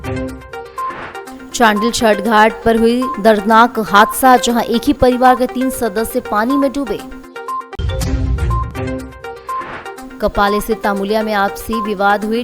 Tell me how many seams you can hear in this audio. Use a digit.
1